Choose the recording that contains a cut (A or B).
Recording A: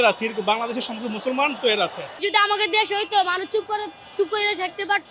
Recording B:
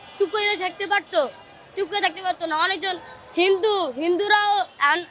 A